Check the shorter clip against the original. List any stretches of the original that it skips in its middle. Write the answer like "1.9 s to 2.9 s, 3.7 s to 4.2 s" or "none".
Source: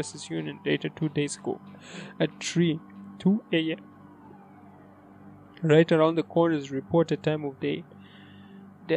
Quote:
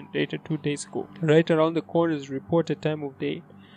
1.6 s to 5.5 s